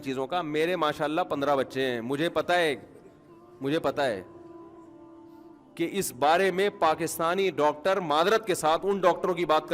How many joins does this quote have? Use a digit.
2